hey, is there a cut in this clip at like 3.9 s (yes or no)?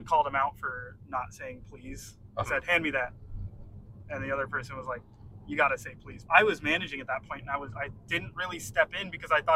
no